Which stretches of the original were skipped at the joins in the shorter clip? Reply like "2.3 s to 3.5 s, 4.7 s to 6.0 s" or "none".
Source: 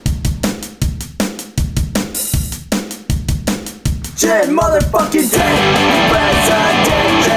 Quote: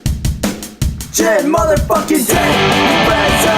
0.9 s to 4.0 s